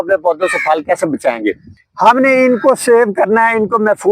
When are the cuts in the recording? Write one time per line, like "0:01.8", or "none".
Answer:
0:01.5